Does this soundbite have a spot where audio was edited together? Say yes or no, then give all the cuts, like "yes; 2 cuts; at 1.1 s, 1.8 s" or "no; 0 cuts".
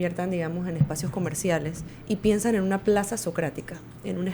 yes; 1 cut; at 1.9 s